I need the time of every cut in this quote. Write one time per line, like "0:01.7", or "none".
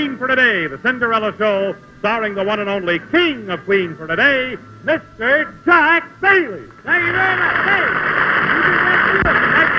none